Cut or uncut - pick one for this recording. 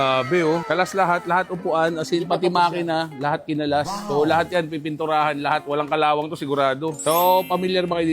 uncut